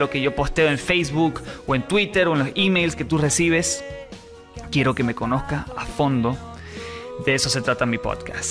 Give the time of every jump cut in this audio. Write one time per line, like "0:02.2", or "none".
0:05.5